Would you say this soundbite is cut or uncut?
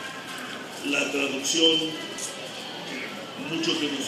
uncut